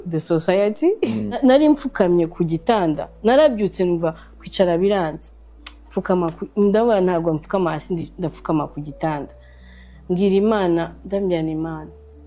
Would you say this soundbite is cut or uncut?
cut